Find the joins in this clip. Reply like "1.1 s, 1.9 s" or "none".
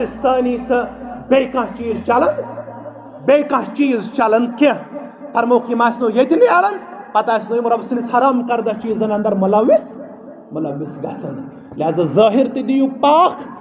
none